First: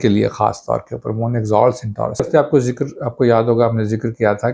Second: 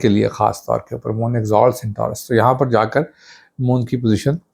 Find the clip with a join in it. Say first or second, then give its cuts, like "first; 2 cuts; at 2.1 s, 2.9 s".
first; 1 cut; at 2.2 s